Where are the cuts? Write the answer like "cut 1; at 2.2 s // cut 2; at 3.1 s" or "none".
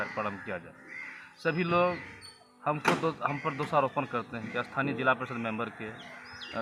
none

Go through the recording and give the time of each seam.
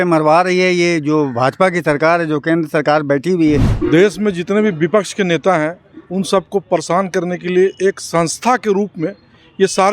cut 1; at 3.7 s

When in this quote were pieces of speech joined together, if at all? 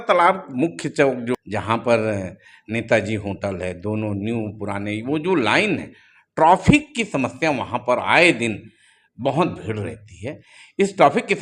cut 1; at 1.3 s

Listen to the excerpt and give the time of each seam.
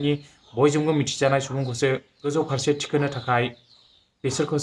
cut 1; at 2.3 s

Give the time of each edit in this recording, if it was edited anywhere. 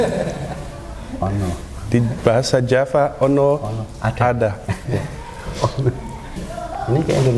cut 1; at 6.4 s

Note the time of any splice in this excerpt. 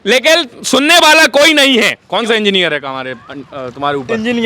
cut 1; at 2.0 s

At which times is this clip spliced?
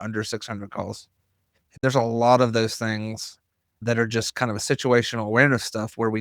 cut 1; at 1.7 s

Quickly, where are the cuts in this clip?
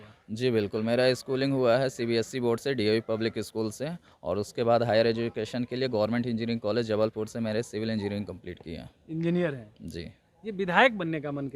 none

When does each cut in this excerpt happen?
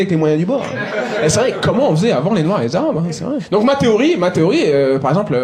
none

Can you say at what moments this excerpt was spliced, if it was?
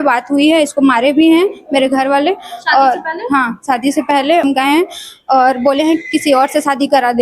cut 1; at 4.4 s

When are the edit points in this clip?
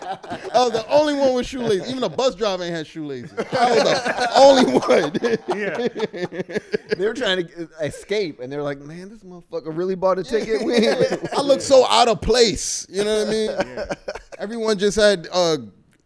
none

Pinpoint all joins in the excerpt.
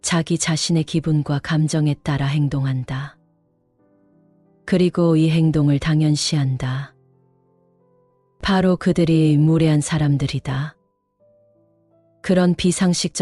cut 1; at 3.1 s // cut 2; at 4.6 s

